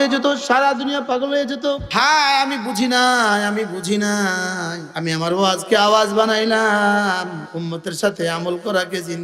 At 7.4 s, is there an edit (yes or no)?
yes